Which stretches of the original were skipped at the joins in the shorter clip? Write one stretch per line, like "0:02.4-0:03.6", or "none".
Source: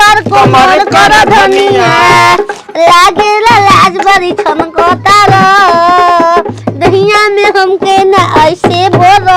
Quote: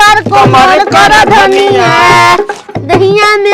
0:02.6-0:06.6